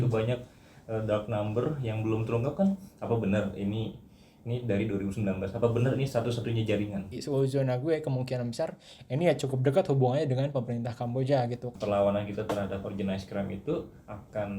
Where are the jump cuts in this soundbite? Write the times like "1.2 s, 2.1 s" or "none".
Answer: 7.2 s, 11.7 s